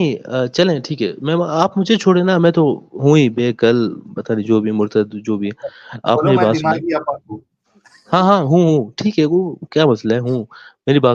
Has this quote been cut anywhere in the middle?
no; 0 cuts

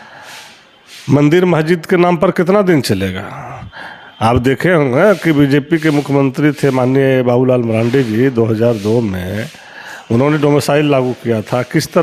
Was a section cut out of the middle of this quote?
no; 0 cuts

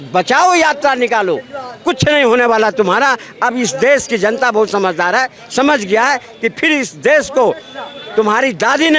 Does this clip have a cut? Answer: no; 0 cuts

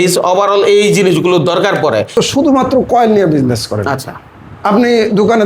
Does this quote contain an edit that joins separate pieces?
yes; 1 cut; at 2.1 s

